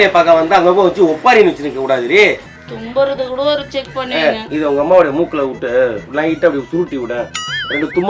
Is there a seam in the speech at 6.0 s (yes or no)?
no